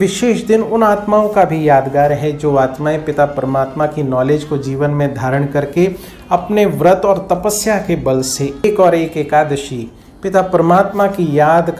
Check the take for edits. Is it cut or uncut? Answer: cut